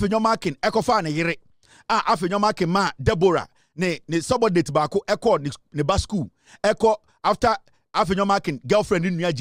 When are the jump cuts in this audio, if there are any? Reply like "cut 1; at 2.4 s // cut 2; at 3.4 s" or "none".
none